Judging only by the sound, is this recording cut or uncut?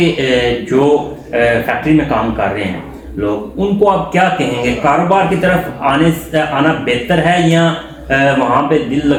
uncut